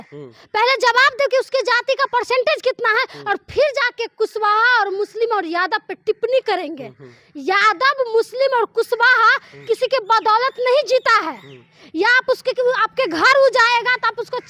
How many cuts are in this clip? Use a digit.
0